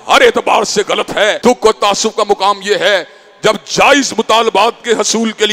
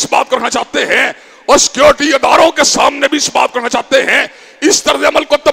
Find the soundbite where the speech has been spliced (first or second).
first